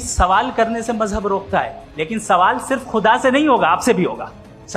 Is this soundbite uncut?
no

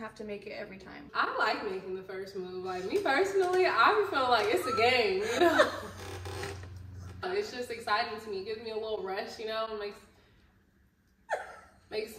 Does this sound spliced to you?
yes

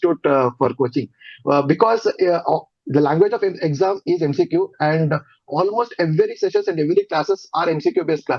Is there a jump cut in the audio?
no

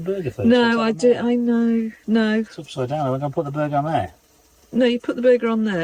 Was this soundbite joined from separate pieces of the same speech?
no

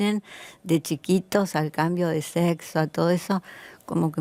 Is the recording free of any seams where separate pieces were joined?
yes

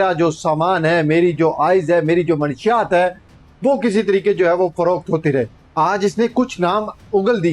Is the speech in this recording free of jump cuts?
no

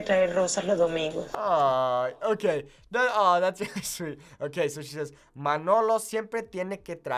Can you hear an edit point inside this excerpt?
no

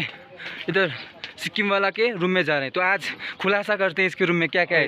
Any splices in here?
no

